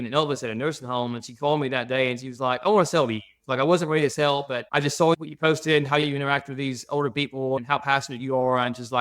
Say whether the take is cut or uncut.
uncut